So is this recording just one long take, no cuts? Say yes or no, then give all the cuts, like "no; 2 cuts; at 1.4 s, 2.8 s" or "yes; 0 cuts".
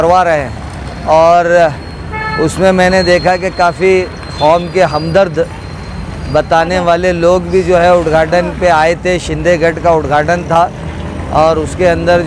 yes; 0 cuts